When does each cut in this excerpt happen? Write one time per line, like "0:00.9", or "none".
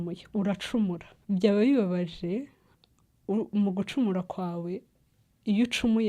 0:01.1